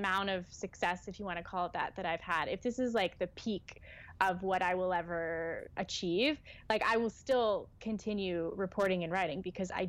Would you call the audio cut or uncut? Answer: uncut